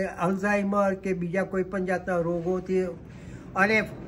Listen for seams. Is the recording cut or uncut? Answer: uncut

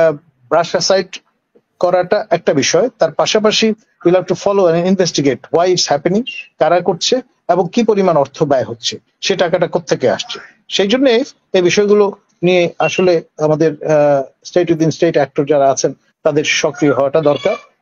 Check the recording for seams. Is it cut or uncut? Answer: uncut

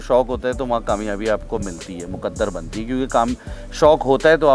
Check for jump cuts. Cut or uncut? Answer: uncut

